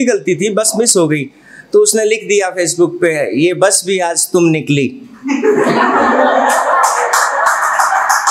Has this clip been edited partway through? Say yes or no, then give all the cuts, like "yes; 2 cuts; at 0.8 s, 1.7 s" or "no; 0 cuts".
no; 0 cuts